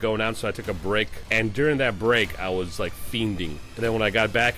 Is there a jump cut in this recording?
yes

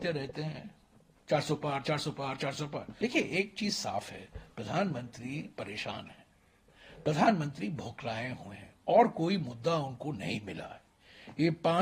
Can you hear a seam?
yes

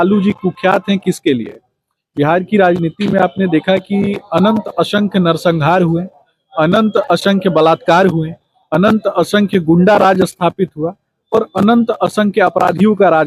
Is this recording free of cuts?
yes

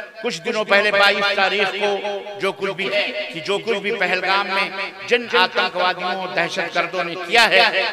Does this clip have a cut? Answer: yes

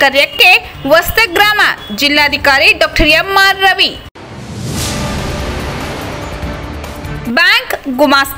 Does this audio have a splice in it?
no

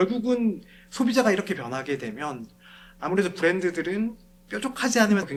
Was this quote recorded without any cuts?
yes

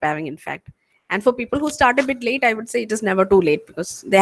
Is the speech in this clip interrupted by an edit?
no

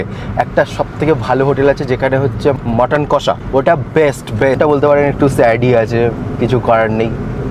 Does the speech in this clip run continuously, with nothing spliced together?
no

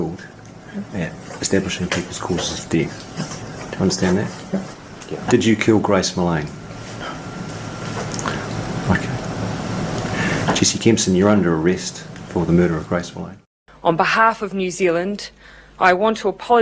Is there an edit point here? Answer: yes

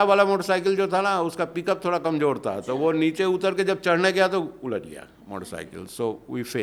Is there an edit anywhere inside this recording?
no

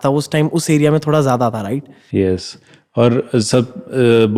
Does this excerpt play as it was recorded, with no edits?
yes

